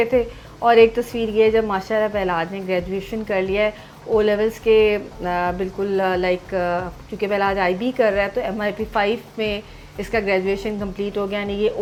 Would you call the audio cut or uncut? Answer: uncut